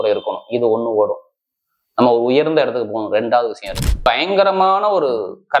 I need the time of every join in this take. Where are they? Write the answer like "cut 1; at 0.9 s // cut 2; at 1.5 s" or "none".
cut 1; at 4.1 s

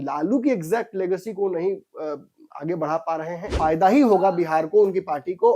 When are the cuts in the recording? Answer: cut 1; at 3.5 s

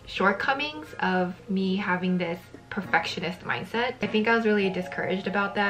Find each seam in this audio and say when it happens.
none

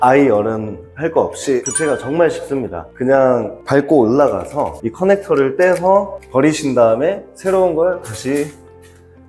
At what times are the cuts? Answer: cut 1; at 4.8 s

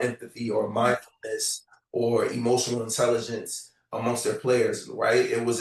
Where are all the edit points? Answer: none

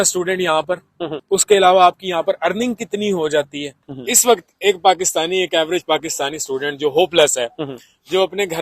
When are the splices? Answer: cut 1; at 1.1 s // cut 2; at 3.8 s

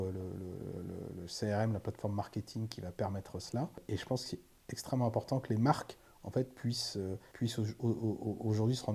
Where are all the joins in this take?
cut 1; at 3.8 s // cut 2; at 7.3 s

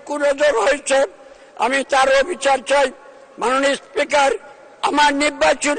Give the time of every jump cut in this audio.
none

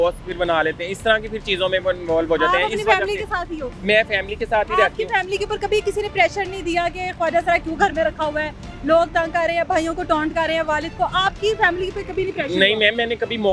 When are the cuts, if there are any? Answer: none

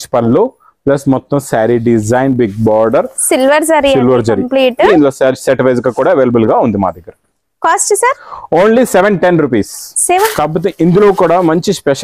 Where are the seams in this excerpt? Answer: cut 1; at 4.9 s // cut 2; at 10.3 s

